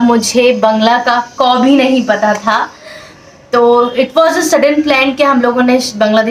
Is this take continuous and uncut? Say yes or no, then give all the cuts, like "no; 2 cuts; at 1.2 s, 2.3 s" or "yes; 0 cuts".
yes; 0 cuts